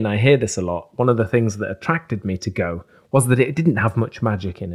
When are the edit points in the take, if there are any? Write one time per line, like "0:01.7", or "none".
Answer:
none